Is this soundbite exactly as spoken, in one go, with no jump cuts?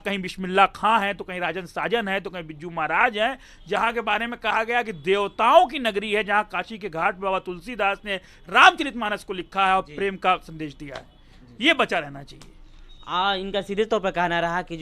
yes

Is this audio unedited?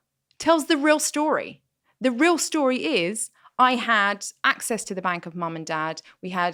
yes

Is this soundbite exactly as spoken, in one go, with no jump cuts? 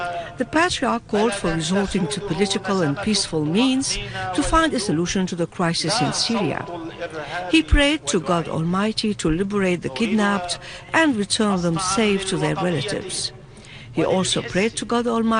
no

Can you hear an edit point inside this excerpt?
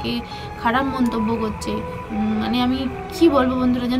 no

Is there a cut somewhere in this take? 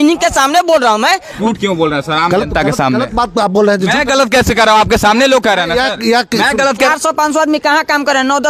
yes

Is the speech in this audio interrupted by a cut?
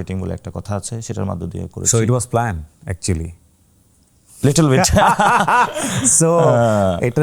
no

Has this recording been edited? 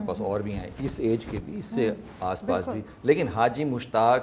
no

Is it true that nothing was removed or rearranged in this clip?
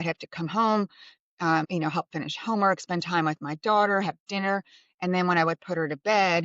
no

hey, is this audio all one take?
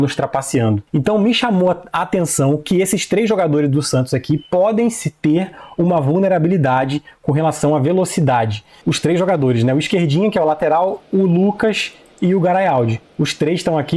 no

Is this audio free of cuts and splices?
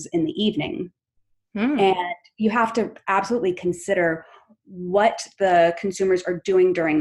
yes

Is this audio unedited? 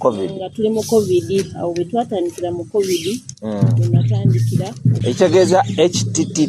no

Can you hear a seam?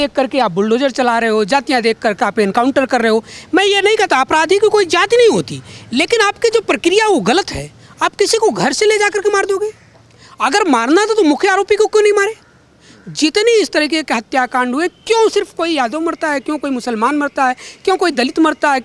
no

